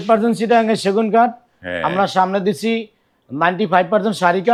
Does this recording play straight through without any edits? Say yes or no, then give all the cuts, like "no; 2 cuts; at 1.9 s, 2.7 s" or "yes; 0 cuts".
yes; 0 cuts